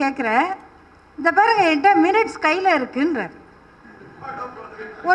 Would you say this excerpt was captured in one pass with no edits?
yes; 0 cuts

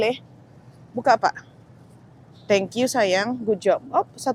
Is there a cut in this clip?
no; 0 cuts

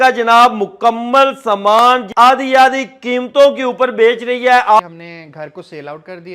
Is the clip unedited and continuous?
no; 2 cuts; at 2.1 s, 4.8 s

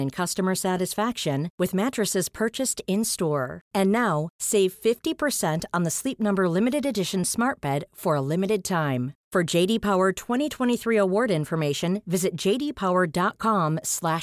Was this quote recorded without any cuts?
yes; 0 cuts

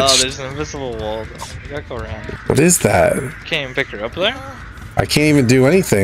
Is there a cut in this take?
yes; 2 cuts; at 2.3 s, 3.4 s

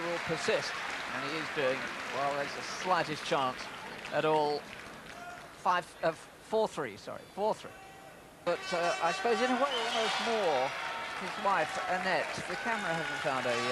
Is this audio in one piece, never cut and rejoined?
no; 1 cut; at 1.5 s

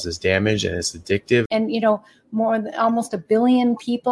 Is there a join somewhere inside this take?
yes; 1 cut; at 1.5 s

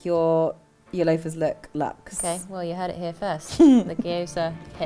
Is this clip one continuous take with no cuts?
yes; 0 cuts

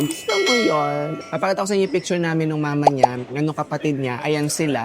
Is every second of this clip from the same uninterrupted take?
no; 1 cut; at 1.1 s

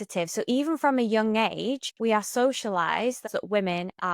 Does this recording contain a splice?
yes; 2 cuts; at 1.9 s, 3.3 s

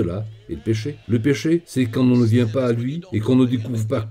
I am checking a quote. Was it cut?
yes; 1 cut; at 1.0 s

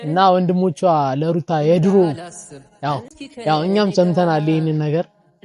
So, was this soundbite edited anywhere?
yes; 1 cut; at 3.1 s

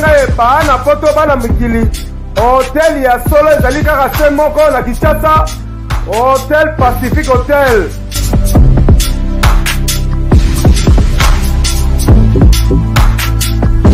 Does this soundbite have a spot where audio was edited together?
no; 0 cuts

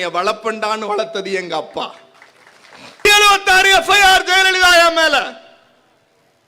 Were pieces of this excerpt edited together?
yes; 1 cut; at 3.1 s

